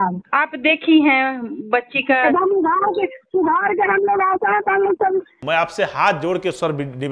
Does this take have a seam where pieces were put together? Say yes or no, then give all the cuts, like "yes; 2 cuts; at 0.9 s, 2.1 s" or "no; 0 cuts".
yes; 1 cut; at 5.4 s